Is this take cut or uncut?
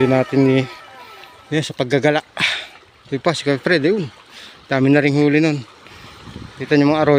uncut